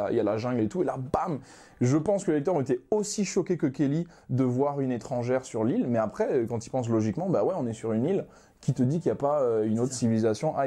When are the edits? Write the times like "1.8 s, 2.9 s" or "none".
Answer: none